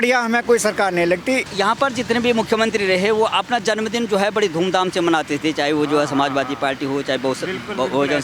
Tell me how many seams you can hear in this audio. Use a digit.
0